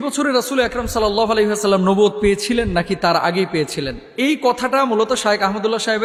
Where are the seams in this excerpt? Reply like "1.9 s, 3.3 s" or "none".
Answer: none